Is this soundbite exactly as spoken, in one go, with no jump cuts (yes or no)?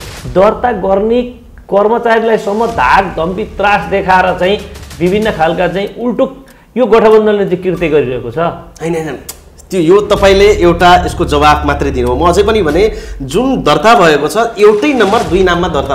yes